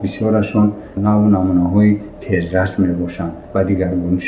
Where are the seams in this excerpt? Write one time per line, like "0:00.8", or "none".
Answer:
0:01.0
0:03.4